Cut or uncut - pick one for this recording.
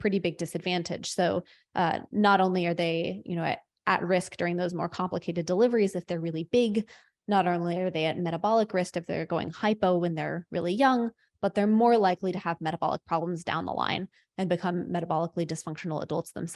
uncut